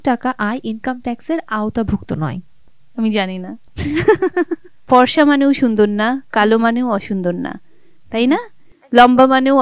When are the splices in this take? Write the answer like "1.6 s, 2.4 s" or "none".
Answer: 4.7 s

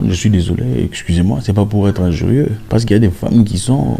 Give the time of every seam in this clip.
2.6 s

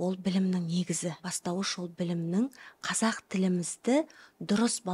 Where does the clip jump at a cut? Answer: 1.3 s

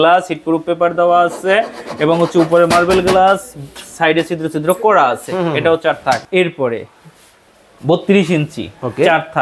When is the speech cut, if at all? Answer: 6.2 s

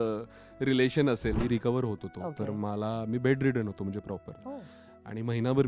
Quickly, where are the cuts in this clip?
1.4 s

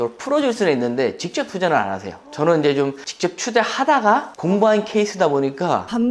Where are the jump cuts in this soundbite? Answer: none

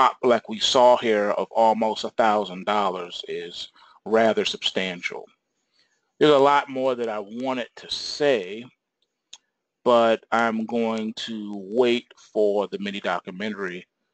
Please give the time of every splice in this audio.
none

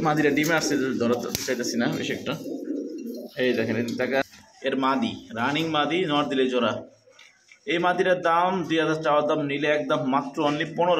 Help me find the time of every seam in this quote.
4.2 s

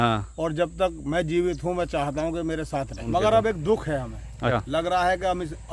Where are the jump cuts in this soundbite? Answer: 3.0 s, 4.5 s

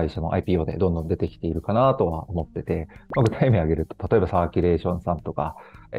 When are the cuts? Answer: none

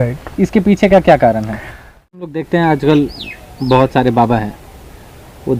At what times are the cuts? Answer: 2.2 s

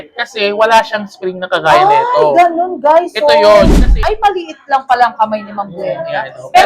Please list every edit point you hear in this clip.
4.0 s

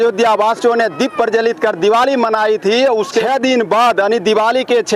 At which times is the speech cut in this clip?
3.2 s

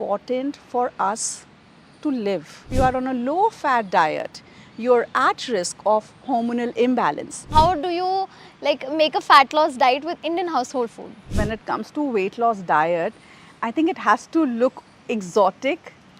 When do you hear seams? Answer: 2.7 s, 7.5 s, 11.3 s

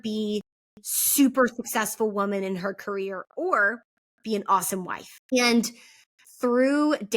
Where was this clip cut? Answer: 5.3 s

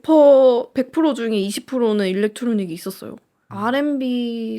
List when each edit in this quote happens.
3.3 s

